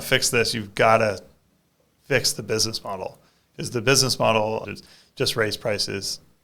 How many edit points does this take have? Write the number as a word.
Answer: one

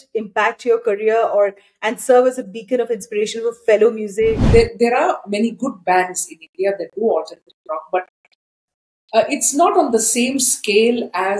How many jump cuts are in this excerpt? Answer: one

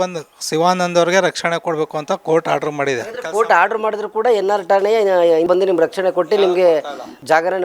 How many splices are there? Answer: one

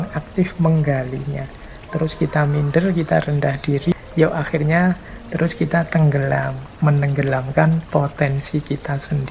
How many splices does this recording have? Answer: two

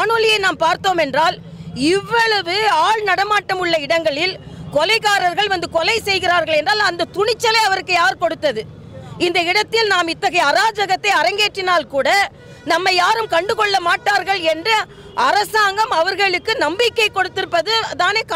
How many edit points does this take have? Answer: zero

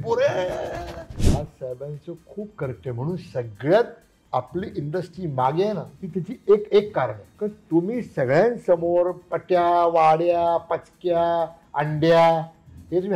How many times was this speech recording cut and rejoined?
three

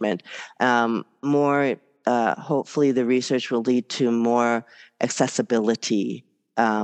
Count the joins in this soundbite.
zero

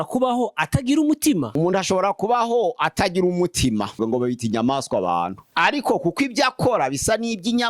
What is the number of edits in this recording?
three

